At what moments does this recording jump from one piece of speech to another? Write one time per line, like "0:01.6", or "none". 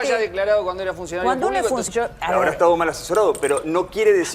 0:01.8